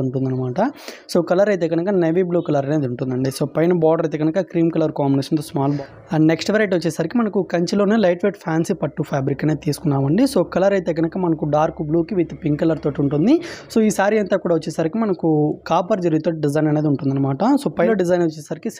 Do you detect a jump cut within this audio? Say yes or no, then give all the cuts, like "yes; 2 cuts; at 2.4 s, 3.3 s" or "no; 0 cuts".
yes; 2 cuts; at 5.8 s, 17.9 s